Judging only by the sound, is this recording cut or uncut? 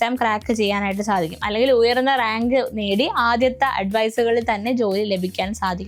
uncut